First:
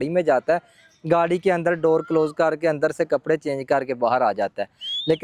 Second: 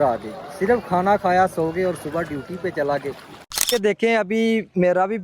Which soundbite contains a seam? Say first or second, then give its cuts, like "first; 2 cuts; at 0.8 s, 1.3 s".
second; 1 cut; at 3.7 s